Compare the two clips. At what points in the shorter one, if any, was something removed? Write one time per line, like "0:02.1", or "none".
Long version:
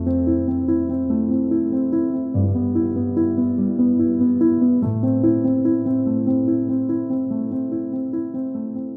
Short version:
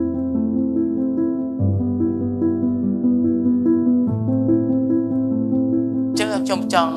none